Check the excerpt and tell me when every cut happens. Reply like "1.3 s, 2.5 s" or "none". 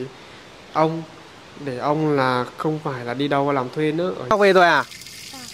4.3 s